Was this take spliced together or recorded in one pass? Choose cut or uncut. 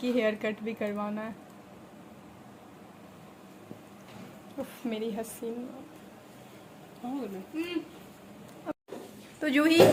uncut